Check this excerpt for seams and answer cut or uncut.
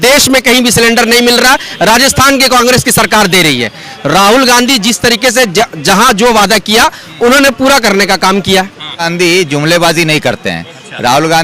cut